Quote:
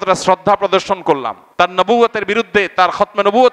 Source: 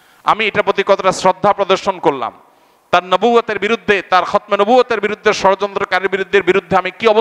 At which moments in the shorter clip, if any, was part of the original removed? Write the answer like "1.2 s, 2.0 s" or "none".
1.4 s